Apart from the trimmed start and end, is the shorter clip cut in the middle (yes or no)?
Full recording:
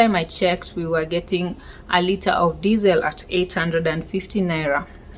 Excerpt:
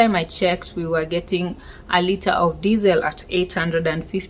no